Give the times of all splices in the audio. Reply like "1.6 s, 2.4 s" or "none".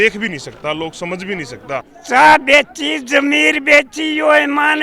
1.9 s